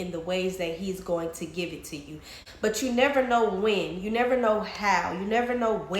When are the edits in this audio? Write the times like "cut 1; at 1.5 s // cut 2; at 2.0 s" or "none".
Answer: cut 1; at 2.3 s